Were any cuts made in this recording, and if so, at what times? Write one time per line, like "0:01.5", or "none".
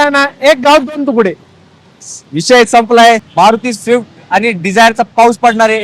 0:03.2